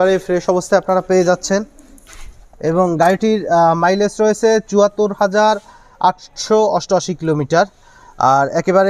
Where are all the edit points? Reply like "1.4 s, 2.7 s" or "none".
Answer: none